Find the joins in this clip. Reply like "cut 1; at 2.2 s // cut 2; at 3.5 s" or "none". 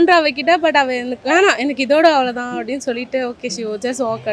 none